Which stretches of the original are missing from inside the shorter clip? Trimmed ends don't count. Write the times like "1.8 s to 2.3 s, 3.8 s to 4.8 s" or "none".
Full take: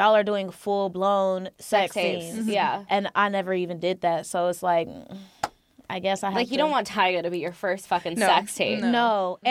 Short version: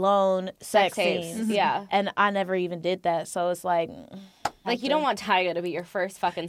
5.6 s to 6.3 s